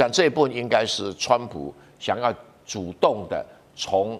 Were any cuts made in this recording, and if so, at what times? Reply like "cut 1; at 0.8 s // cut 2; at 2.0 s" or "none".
none